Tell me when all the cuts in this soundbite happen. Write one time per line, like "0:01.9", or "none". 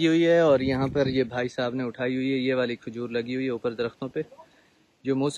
none